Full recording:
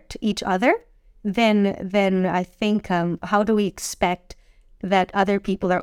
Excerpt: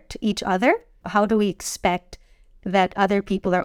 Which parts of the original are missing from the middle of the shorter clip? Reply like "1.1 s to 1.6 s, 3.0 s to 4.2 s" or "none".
1.0 s to 3.2 s